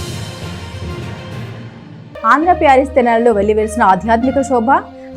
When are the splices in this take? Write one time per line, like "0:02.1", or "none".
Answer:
none